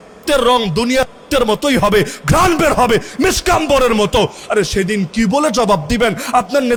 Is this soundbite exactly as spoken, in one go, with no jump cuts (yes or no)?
yes